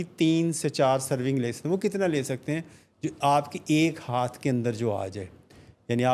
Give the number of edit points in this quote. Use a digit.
0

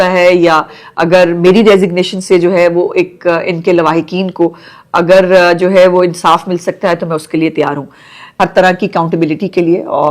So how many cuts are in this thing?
1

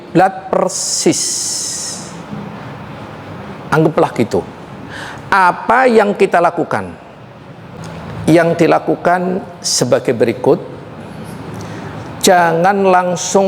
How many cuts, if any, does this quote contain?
1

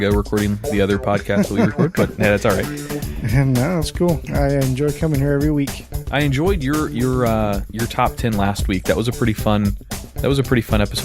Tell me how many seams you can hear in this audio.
1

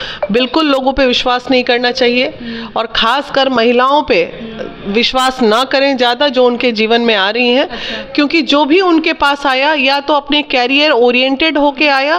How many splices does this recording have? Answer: 0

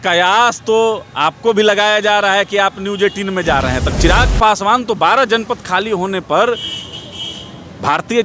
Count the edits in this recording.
1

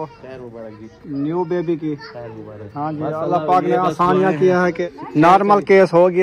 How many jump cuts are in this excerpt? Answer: 1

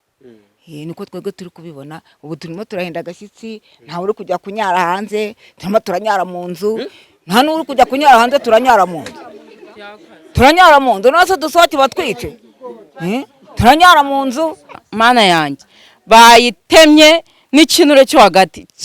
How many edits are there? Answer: 1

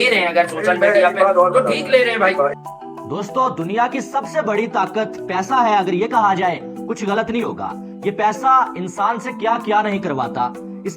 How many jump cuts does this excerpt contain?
1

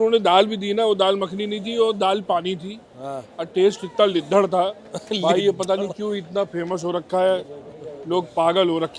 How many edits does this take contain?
0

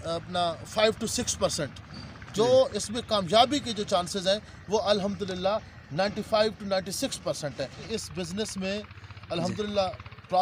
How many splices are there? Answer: 1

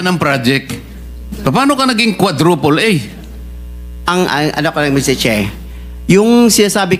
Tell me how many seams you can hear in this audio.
0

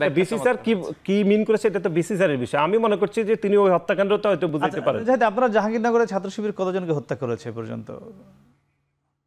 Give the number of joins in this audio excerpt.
0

